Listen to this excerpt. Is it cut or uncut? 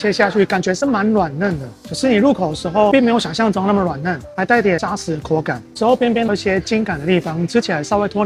uncut